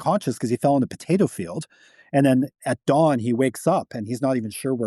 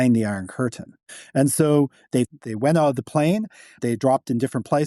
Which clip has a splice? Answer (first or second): second